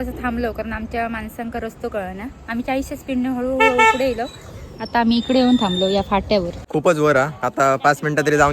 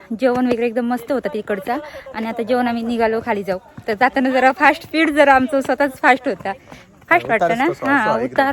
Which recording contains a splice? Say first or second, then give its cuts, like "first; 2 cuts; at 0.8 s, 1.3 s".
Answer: first; 1 cut; at 6.6 s